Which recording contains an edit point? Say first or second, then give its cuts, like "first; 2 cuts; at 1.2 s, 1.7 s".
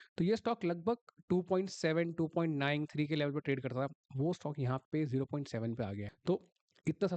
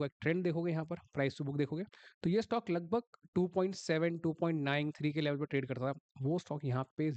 first; 1 cut; at 6.1 s